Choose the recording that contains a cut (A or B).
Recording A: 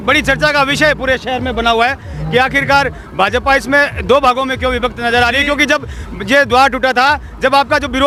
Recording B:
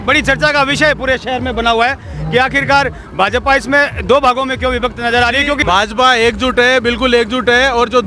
B